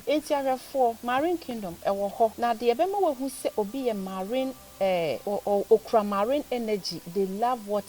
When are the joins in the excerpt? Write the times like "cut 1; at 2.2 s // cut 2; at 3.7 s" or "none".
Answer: cut 1; at 1.0 s // cut 2; at 2.3 s // cut 3; at 5.2 s